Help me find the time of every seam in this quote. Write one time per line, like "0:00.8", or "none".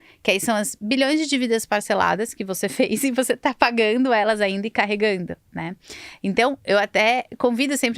none